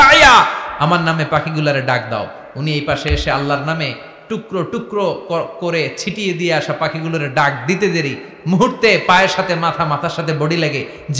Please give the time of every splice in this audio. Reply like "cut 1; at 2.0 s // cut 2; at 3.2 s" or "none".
none